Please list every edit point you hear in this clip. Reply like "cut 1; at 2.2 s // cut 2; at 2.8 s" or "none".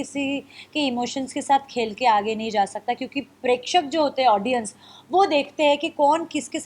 none